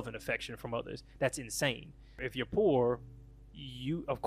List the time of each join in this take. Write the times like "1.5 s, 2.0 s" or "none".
2.3 s